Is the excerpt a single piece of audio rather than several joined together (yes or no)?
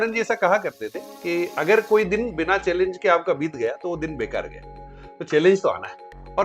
yes